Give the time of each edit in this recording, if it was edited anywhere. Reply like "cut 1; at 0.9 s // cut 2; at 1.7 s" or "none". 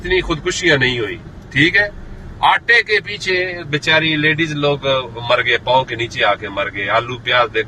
none